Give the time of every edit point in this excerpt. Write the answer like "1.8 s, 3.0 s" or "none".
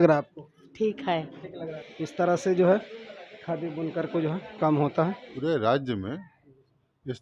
1.8 s, 5.2 s